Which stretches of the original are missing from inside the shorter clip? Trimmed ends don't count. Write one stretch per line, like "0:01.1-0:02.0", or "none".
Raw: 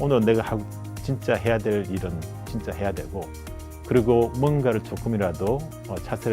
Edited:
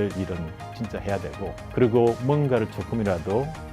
0:03.3-0:03.7